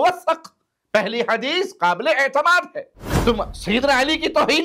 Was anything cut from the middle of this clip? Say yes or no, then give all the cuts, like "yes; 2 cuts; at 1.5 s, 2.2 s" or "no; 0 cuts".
yes; 1 cut; at 3.0 s